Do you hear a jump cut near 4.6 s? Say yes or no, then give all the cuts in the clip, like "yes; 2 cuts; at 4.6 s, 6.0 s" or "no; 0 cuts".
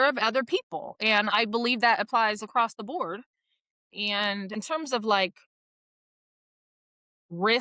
yes; 1 cut; at 4.6 s